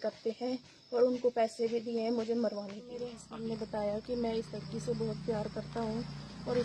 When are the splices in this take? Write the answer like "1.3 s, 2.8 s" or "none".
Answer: 3.2 s

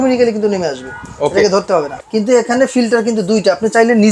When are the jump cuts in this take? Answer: 2.0 s

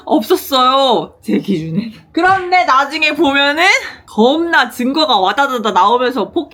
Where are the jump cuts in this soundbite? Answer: none

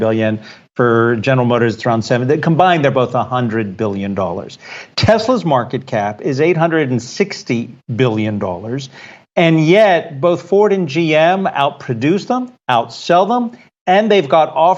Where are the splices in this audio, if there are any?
none

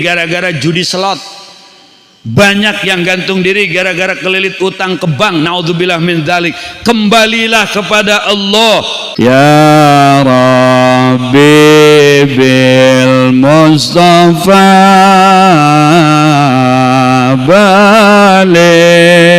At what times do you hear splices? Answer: 9.0 s

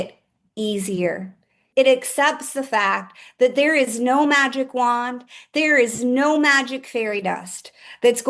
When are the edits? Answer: 1.7 s

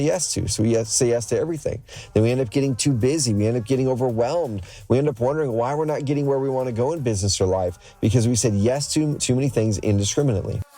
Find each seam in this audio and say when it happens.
9.2 s

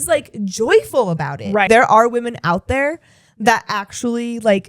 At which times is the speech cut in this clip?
1.7 s

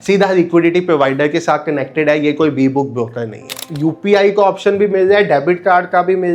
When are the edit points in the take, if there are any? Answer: 3.6 s

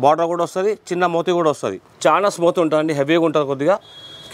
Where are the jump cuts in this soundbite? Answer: 1.8 s

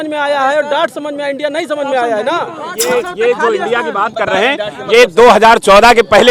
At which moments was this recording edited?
2.7 s

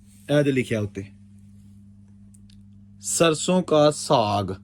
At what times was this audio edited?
none

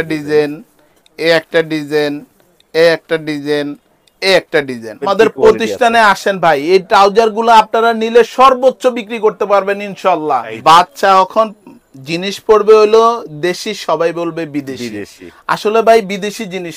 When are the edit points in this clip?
5.0 s, 10.5 s

